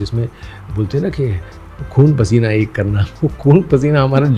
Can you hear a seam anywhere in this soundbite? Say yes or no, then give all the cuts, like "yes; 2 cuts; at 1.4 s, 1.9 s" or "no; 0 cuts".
no; 0 cuts